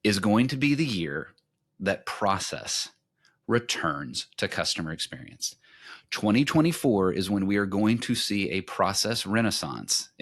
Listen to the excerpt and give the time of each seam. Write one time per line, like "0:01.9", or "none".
none